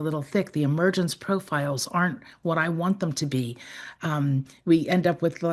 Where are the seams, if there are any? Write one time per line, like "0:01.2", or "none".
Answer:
none